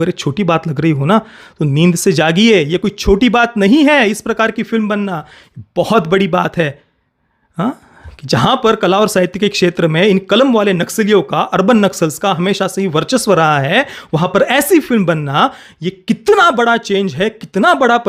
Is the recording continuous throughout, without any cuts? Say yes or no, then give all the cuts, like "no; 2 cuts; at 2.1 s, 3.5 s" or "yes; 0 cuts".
yes; 0 cuts